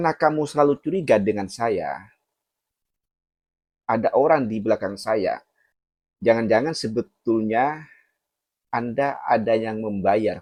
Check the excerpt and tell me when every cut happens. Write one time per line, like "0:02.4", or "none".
none